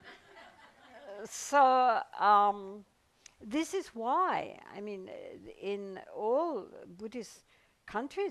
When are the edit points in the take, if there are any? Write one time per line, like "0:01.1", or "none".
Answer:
0:04.4